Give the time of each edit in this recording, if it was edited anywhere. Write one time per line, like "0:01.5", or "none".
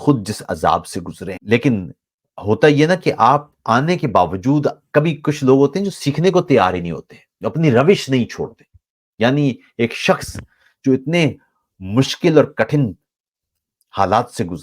0:01.3